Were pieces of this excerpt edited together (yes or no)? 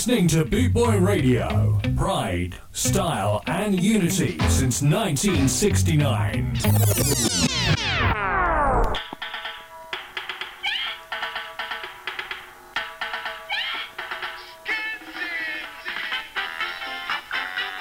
no